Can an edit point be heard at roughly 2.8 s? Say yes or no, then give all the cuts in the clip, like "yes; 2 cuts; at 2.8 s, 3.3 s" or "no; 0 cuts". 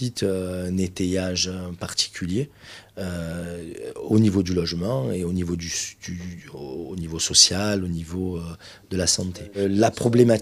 yes; 1 cut; at 2.8 s